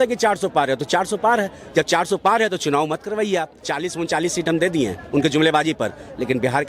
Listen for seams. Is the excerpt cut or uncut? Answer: cut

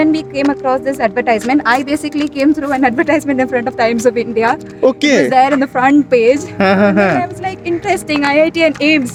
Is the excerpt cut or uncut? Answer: uncut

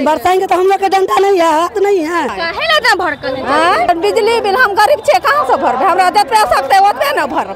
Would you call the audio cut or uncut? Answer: cut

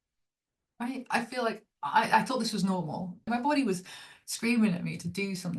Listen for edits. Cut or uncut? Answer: cut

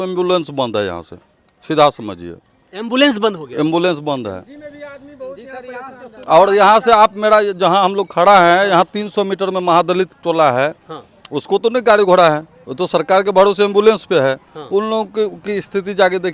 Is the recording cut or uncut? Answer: uncut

